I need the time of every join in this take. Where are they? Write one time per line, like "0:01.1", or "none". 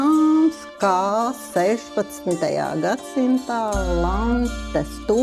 none